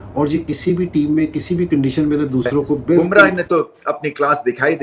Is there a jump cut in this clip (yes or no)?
yes